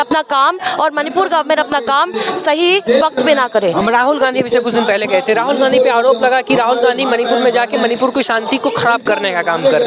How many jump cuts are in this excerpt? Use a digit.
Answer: 0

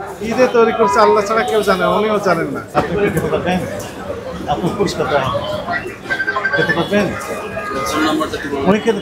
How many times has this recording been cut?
1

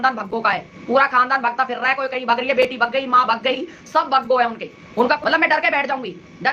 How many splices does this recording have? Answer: 1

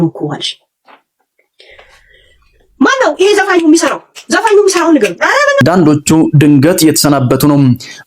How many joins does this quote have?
1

